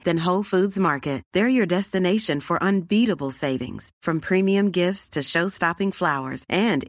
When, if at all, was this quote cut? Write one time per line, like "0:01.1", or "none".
none